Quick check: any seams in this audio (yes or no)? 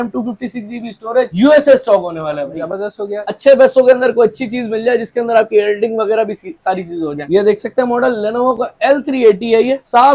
no